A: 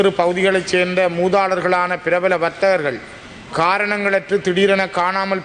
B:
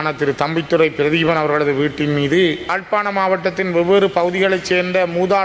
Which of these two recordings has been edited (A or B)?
B